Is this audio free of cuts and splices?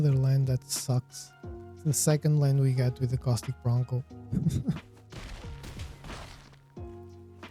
no; 1 cut; at 6.5 s

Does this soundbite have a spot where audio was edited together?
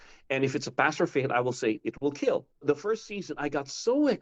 yes; 1 cut; at 2.6 s

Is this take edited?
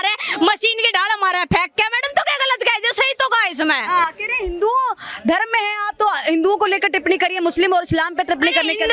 no; 0 cuts

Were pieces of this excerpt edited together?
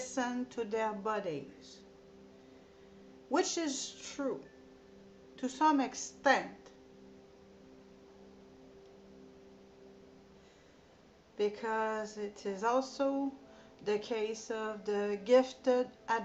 yes; 1 cut; at 3.9 s

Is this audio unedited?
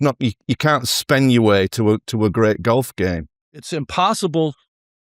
no; 1 cut; at 3.6 s

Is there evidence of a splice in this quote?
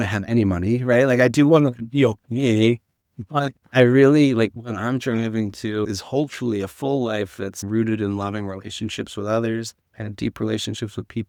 no; 0 cuts

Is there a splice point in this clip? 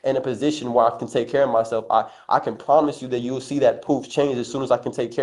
no; 0 cuts

